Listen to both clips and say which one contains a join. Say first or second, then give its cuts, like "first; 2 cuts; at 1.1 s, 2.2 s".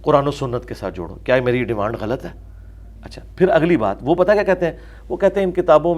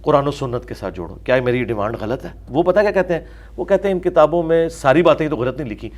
second; 1 cut; at 2.5 s